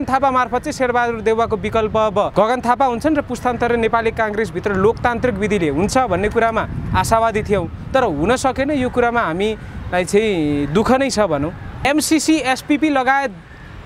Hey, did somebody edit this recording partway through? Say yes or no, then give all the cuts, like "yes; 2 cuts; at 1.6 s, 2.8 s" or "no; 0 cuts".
yes; 2 cuts; at 2.3 s, 11.8 s